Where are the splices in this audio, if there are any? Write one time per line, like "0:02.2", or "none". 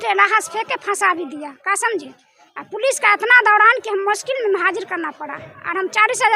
none